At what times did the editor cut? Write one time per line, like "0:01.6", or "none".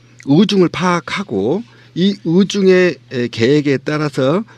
0:02.3